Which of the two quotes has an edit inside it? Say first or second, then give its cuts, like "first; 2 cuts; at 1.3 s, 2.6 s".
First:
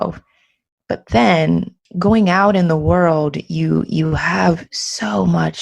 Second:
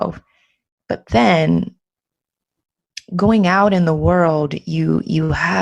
first; 1 cut; at 1.8 s